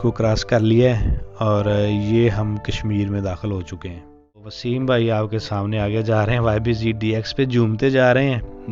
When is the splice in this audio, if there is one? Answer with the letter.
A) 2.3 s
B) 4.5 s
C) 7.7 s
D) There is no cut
B